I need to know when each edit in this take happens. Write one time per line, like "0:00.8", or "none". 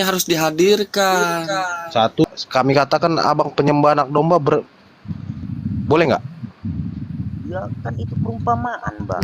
0:02.2